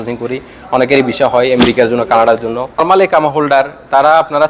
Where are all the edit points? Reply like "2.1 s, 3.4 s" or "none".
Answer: 2.8 s